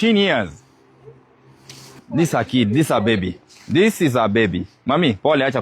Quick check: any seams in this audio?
yes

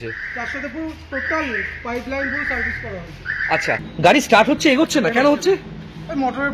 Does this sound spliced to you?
yes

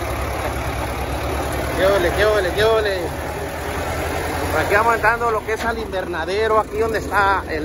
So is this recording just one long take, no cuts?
yes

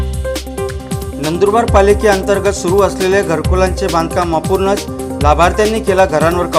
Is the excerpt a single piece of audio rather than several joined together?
yes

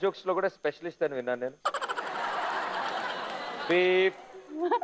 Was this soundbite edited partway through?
no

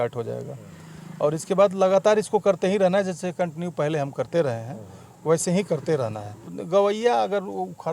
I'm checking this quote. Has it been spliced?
yes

